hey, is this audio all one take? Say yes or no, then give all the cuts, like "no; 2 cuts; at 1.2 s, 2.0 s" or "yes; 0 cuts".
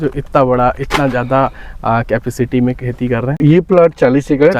no; 1 cut; at 3.4 s